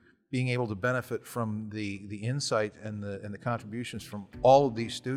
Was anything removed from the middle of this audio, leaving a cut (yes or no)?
no